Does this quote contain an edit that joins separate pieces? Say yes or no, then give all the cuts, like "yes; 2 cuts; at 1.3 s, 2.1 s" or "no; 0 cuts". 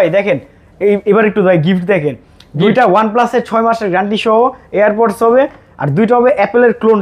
no; 0 cuts